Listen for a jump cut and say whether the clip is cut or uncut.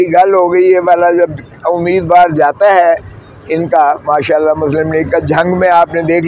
uncut